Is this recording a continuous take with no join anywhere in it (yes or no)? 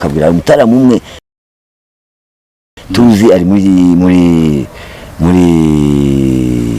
yes